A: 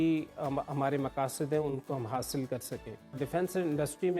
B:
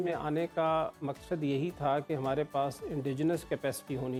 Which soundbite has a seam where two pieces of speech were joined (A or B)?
A